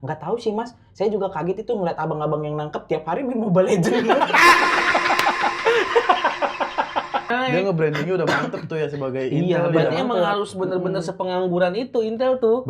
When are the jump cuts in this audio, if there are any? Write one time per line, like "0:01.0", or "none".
0:07.3